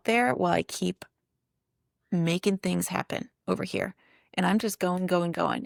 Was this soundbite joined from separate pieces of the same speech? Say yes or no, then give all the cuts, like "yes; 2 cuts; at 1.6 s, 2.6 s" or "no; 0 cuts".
no; 0 cuts